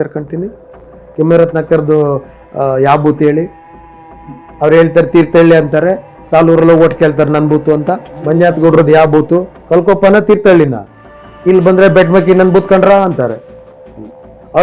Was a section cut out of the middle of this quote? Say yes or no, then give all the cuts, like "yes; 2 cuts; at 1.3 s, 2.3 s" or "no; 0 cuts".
yes; 2 cuts; at 8.3 s, 9.5 s